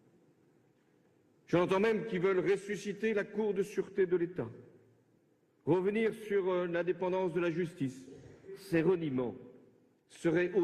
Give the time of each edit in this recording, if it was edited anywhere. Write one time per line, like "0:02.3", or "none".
none